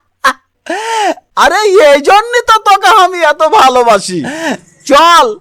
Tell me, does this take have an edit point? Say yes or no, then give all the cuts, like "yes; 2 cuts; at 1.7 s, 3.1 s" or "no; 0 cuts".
no; 0 cuts